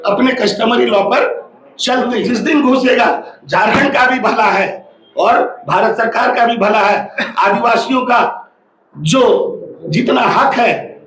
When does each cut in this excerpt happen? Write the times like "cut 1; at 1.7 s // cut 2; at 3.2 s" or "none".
cut 1; at 2.2 s